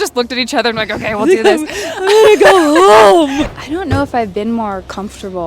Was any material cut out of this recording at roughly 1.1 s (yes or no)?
no